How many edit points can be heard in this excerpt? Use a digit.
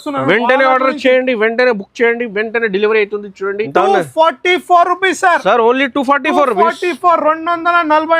1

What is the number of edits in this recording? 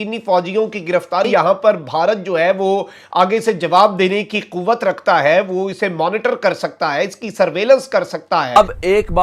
2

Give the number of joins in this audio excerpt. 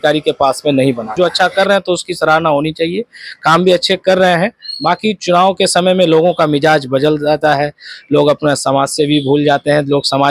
1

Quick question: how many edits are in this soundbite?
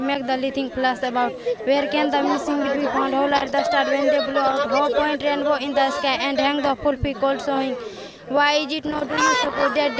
0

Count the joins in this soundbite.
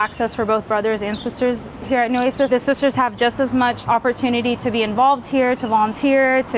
0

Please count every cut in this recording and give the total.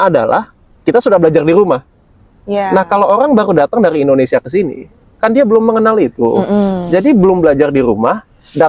0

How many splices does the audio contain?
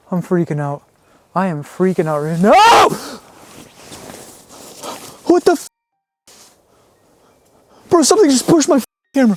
0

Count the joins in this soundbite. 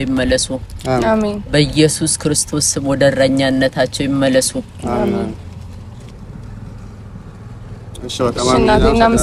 0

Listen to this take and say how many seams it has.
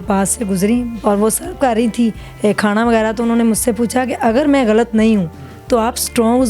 1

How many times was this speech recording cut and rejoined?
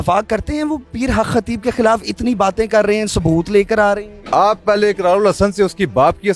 1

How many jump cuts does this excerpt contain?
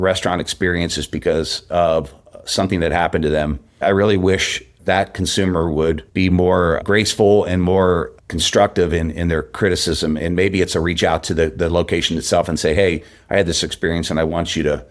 2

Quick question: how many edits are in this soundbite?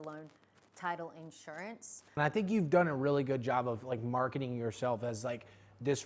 1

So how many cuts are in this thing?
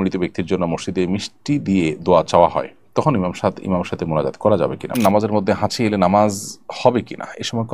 1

